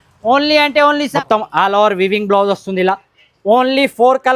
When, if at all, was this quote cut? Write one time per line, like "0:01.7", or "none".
0:01.1